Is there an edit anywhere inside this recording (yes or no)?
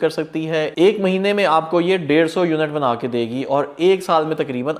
no